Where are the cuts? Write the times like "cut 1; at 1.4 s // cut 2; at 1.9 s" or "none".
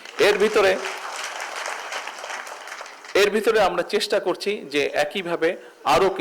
none